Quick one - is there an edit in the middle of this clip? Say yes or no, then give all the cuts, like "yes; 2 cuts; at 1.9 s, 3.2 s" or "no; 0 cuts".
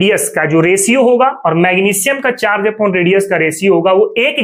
no; 0 cuts